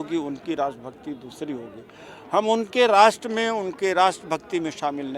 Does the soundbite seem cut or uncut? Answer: uncut